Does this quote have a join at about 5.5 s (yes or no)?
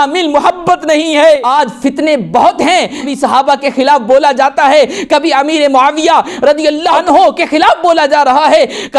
no